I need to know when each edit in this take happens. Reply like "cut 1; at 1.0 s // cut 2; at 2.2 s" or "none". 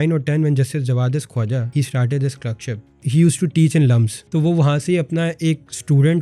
cut 1; at 1.7 s // cut 2; at 3.0 s // cut 3; at 4.1 s